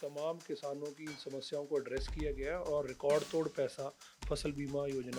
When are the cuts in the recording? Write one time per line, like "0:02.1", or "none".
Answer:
none